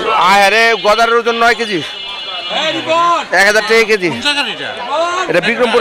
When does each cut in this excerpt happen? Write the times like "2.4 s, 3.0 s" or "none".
none